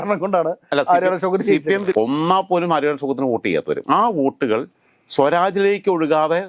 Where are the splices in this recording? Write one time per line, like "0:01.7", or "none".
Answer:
0:01.9
0:03.8